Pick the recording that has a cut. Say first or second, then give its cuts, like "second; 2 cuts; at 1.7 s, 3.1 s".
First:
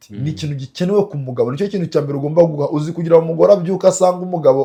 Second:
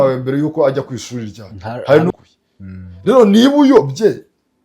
second; 1 cut; at 2.1 s